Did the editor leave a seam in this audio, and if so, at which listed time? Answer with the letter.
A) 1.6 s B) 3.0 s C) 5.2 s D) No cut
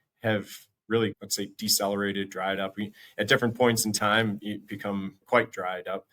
C